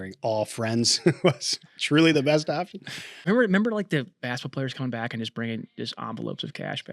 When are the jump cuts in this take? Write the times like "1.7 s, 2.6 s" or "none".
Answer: 3.3 s